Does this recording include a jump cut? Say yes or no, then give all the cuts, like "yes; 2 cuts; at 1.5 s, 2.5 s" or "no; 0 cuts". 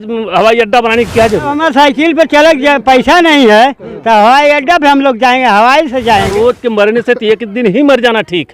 yes; 2 cuts; at 1.6 s, 6.3 s